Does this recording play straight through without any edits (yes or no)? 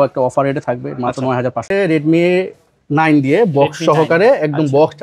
no